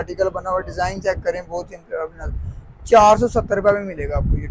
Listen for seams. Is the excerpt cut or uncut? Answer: uncut